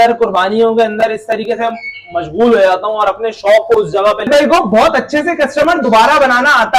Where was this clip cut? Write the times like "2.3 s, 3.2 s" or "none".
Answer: 4.3 s